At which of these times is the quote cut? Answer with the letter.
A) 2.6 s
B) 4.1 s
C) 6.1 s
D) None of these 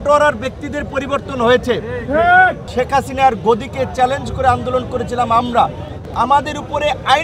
A